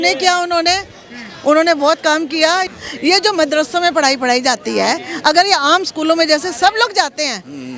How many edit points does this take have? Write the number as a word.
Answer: one